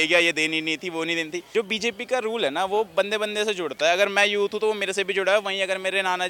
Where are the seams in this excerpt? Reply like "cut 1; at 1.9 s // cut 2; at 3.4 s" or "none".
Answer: cut 1; at 1.4 s